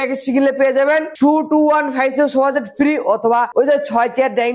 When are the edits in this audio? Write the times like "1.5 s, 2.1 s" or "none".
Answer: 3.5 s